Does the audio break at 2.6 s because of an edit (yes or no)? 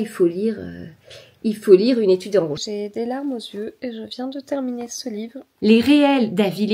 yes